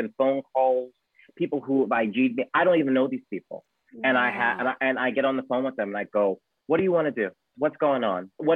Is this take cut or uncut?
uncut